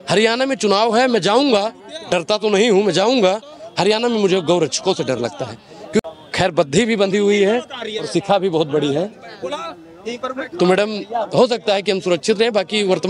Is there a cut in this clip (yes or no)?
no